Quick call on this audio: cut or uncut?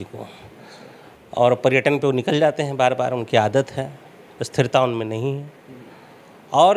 uncut